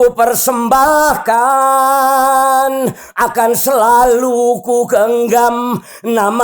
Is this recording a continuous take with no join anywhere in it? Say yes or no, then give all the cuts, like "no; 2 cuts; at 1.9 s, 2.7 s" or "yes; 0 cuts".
yes; 0 cuts